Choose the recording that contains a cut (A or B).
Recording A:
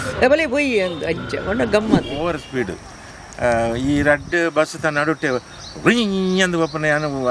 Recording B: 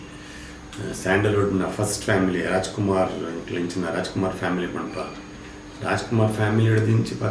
A